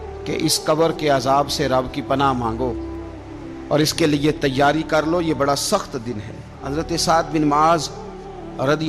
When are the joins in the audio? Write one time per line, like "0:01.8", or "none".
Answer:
0:06.6